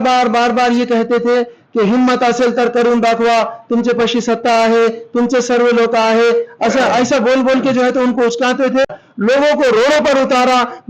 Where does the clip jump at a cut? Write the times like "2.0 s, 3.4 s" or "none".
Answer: 9.0 s